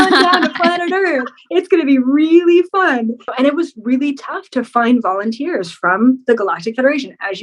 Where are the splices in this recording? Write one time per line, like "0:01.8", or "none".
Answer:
0:03.3